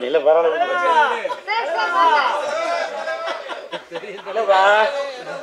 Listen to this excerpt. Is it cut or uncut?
uncut